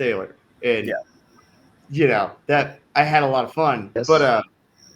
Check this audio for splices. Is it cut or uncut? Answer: cut